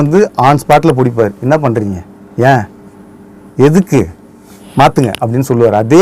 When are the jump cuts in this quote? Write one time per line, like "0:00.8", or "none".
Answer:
0:01.4